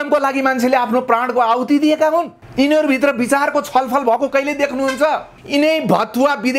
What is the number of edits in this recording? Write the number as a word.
two